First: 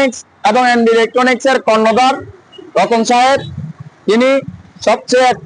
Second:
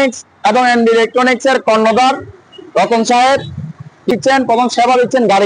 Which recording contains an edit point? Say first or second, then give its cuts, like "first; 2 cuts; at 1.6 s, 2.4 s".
second; 1 cut; at 4.1 s